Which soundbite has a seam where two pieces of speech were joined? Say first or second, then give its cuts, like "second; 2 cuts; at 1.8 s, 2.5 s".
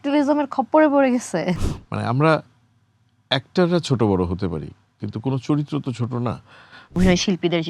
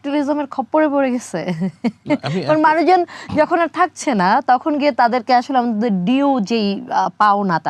first; 2 cuts; at 1.5 s, 7.0 s